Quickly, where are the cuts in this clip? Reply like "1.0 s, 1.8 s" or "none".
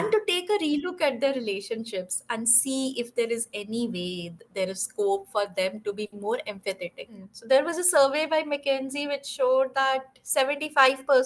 7.3 s